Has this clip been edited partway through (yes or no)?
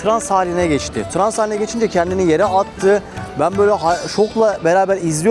no